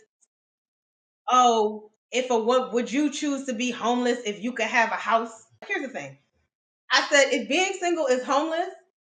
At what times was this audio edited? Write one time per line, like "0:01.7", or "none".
0:05.6